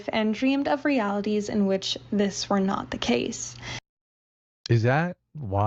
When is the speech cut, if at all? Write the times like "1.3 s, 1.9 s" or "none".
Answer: none